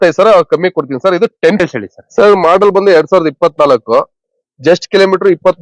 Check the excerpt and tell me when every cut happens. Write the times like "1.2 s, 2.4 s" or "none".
1.6 s